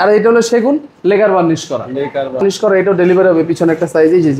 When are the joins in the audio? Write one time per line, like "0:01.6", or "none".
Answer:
0:02.4